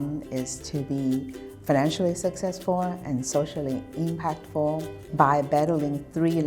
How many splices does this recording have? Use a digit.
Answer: 1